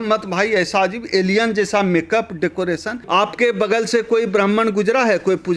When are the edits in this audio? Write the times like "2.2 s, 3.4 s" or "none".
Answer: 2.9 s

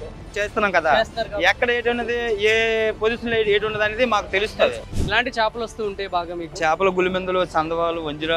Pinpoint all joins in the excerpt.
4.8 s

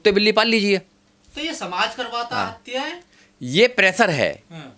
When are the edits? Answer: none

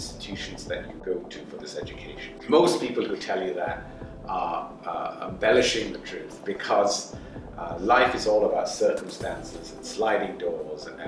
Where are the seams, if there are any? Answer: 0.9 s, 2.3 s

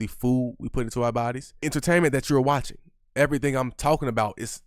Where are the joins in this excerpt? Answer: 1.5 s, 3.0 s

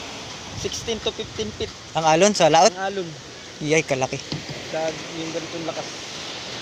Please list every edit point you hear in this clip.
none

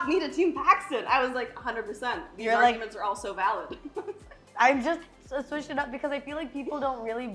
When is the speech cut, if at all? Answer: none

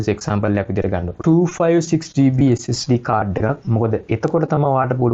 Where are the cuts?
1.1 s

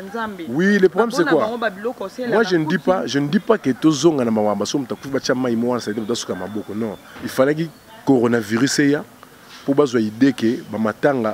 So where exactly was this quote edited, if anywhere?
7.1 s

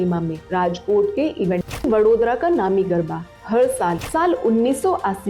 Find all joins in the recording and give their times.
1.9 s, 4.0 s

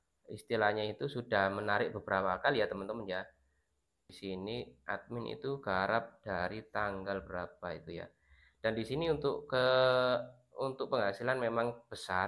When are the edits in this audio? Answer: 4.1 s

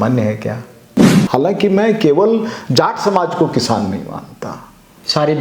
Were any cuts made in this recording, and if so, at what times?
1.1 s

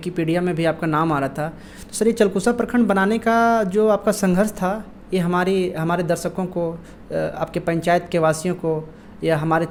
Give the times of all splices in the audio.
none

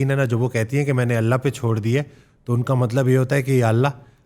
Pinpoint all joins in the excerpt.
none

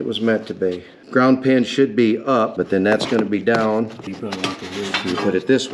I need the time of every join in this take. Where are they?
0.9 s, 2.5 s, 4.1 s

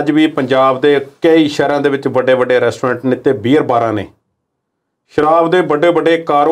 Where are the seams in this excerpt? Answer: none

